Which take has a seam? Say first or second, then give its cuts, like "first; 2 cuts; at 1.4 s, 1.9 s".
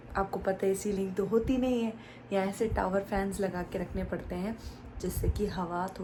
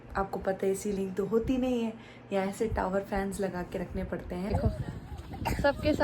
second; 1 cut; at 4.5 s